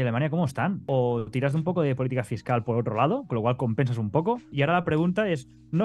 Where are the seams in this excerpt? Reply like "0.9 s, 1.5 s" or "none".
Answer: 0.8 s, 4.5 s